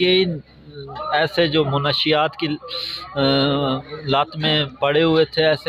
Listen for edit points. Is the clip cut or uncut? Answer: uncut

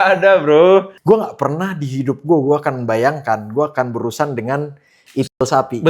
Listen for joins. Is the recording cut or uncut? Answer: cut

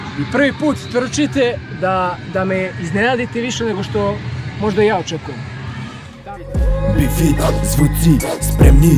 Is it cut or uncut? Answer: cut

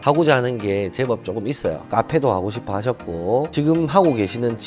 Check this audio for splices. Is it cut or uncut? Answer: uncut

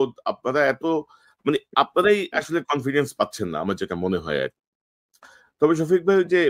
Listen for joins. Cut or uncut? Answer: cut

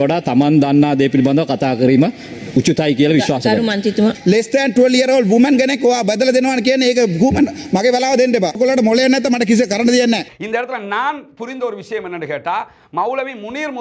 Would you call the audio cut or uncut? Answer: uncut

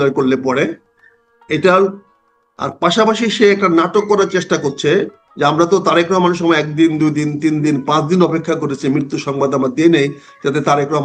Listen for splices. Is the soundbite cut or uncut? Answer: uncut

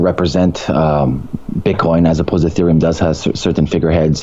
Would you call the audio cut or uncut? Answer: uncut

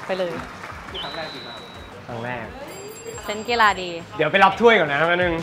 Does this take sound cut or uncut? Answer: uncut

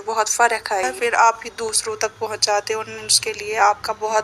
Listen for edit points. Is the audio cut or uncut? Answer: cut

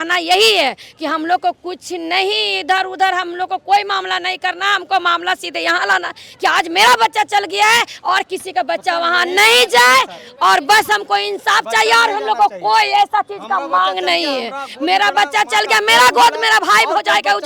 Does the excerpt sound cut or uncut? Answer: uncut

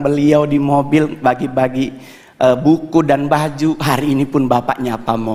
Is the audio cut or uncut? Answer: uncut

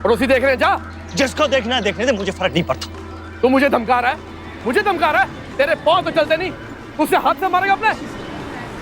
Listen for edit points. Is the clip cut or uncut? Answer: cut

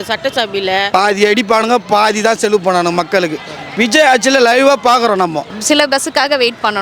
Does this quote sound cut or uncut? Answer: cut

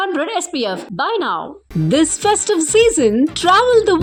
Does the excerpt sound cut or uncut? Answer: uncut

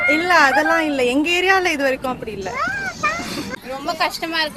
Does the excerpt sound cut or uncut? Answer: uncut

